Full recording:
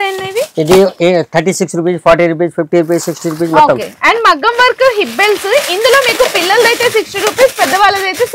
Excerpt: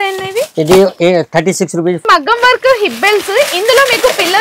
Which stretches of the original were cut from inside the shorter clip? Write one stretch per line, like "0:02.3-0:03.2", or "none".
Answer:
0:02.0-0:04.2

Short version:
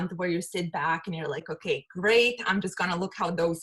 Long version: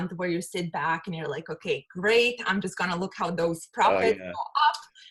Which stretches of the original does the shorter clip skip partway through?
none

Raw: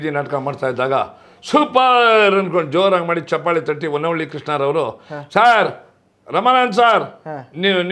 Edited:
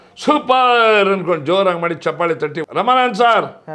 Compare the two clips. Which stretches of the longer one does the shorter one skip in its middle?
0:03.9-0:06.2

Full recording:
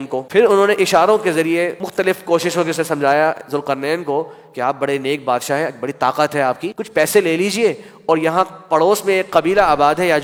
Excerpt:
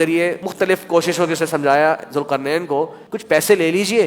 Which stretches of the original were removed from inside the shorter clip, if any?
0:04.4-0:06.7

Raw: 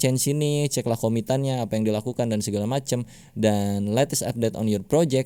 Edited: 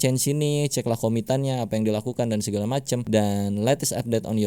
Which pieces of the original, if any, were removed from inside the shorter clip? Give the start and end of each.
0:03.0-0:03.3

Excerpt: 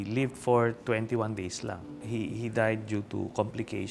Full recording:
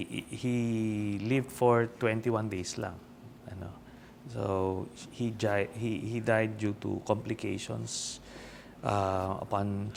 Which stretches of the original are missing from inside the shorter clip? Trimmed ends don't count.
0:03.2-0:05.7

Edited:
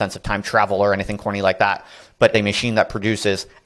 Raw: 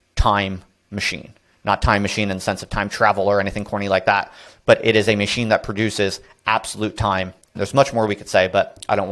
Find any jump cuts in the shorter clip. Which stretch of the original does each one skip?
0:04.8-0:05.1

